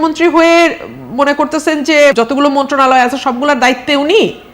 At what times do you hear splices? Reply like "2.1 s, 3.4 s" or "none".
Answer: 2.1 s